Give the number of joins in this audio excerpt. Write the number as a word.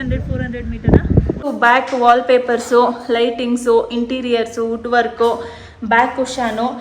one